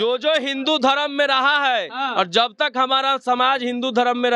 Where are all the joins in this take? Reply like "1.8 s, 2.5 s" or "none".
none